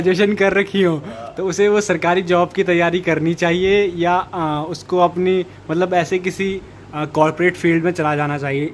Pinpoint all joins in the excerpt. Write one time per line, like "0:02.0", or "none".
none

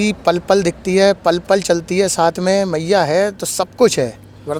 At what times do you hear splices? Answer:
none

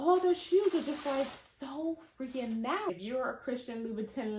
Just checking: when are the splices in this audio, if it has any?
0:02.9

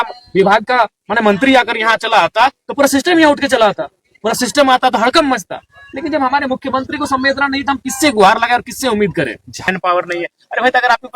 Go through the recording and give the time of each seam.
0:09.7

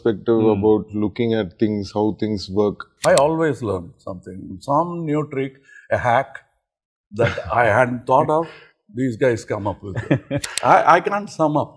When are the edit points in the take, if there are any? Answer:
0:02.9
0:10.4

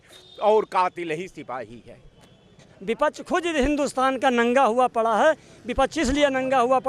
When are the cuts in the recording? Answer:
0:02.7

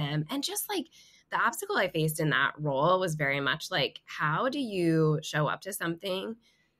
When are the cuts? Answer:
none

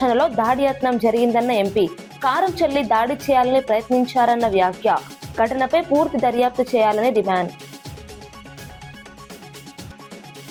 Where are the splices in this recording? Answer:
none

